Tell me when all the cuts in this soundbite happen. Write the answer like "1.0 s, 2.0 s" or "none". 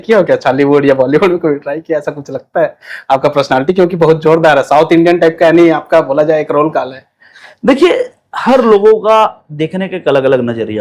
none